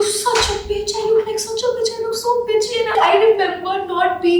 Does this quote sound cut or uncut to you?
cut